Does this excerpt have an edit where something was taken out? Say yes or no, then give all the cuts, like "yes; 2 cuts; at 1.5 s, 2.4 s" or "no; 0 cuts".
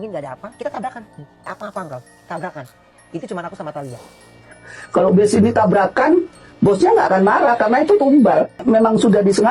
yes; 2 cuts; at 1.5 s, 8.6 s